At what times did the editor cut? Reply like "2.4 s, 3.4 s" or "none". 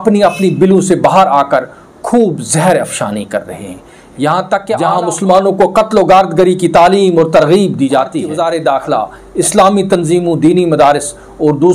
4.9 s, 8.3 s